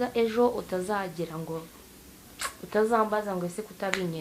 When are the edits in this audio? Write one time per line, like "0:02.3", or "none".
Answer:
none

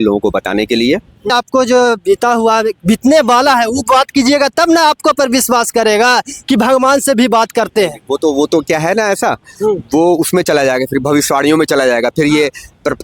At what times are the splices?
0:01.3

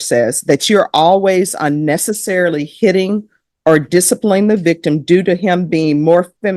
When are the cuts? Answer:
none

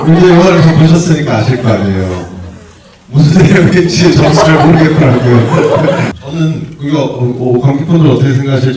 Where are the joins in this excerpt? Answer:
0:06.1

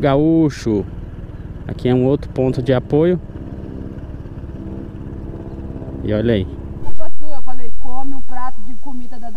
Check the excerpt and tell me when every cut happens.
0:06.9

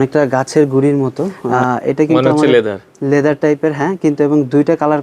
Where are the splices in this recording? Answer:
0:01.4

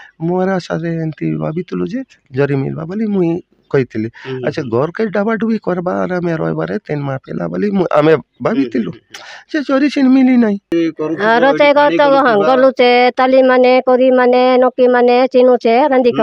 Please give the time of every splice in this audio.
0:10.7

